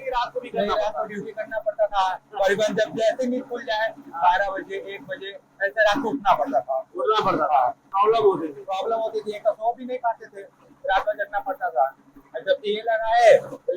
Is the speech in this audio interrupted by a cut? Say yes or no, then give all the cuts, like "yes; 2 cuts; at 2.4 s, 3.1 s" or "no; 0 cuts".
yes; 1 cut; at 7.8 s